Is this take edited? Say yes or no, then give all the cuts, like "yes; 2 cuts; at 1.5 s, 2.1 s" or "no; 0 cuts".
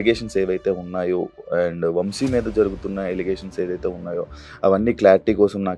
no; 0 cuts